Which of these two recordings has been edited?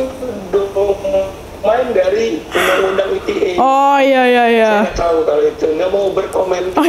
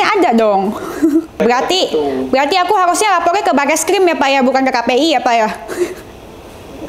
second; 1 cut; at 1.4 s

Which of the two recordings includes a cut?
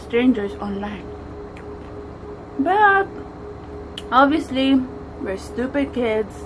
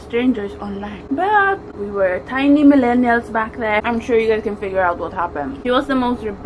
second; 4 cuts; at 1.0 s, 1.7 s, 3.8 s, 5.6 s

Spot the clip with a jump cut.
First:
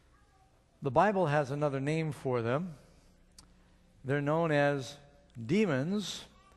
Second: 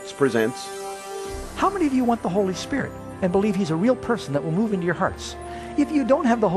first; 1 cut; at 1.5 s

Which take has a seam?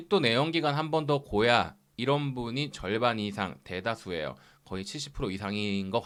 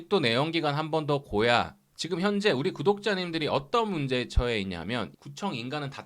second; 2 cuts; at 1.8 s, 5.1 s

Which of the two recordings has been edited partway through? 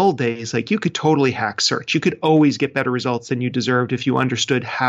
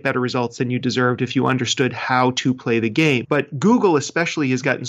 second; 1 cut; at 3.2 s

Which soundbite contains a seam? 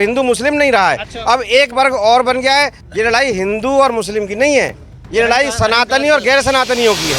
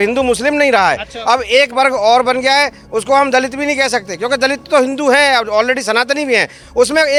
first; 1 cut; at 2.8 s

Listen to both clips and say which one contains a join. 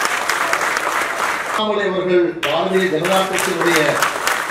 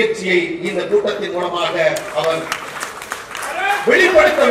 first; 1 cut; at 1.6 s

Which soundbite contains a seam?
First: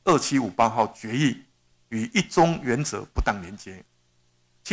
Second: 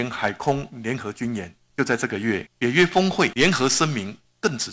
second; 3 cuts; at 1.6 s, 2.5 s, 3.3 s

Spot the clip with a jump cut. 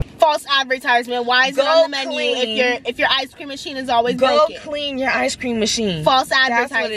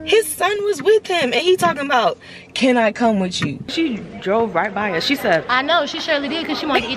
second; 1 cut; at 3.6 s

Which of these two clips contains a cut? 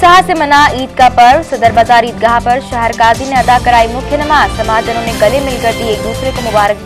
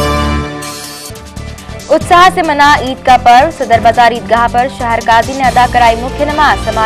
second; 1 cut; at 0.9 s

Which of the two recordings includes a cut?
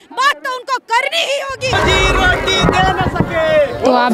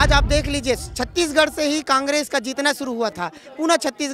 first; 1 cut; at 1.7 s

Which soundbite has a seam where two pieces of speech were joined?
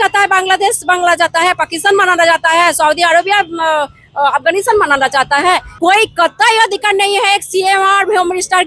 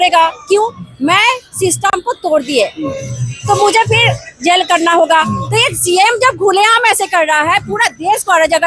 first; 1 cut; at 5.7 s

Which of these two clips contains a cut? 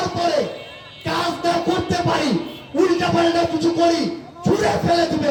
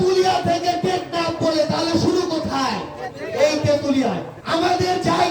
second; 1 cut; at 4.3 s

